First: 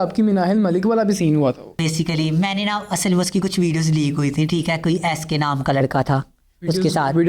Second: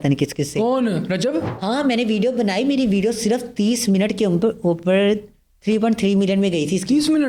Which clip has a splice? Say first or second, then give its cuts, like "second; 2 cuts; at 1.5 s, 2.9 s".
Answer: first; 1 cut; at 1.7 s